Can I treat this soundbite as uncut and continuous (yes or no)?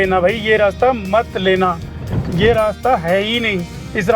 yes